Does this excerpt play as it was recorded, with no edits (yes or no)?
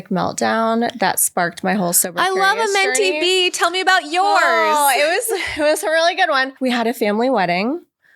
no